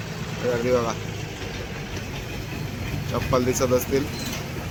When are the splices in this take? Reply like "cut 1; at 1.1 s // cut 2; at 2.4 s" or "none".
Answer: none